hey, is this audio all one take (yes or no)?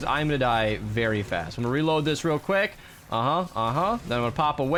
yes